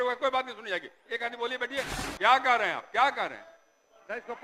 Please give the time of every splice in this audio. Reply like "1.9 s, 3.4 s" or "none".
2.0 s